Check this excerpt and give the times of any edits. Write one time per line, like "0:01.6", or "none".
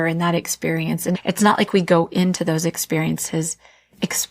none